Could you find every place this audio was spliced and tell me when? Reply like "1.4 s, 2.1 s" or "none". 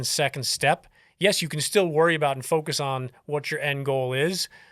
none